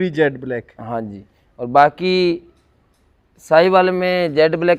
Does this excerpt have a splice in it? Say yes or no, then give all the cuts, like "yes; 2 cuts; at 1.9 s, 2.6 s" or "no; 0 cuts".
no; 0 cuts